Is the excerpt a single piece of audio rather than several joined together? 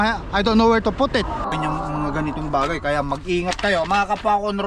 no; 1 cut; at 1.4 s

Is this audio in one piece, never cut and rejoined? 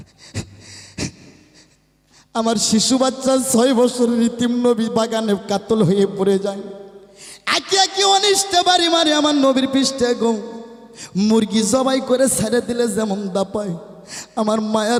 yes; 0 cuts

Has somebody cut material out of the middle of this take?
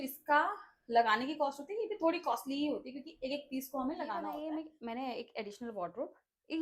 yes; 1 cut; at 4.4 s

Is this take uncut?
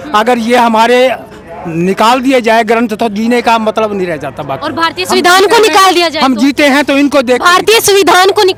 yes; 0 cuts

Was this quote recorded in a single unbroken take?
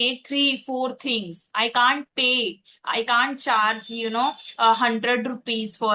yes; 0 cuts

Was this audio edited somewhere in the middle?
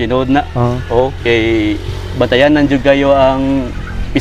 no; 0 cuts

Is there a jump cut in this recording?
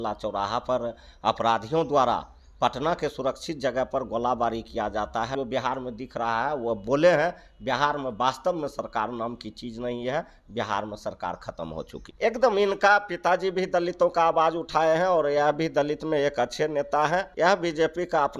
yes; 3 cuts; at 5.3 s, 12.0 s, 17.3 s

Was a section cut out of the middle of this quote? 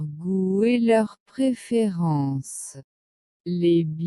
yes; 1 cut; at 2.9 s

